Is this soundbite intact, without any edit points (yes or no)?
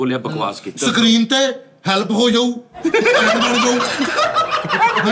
yes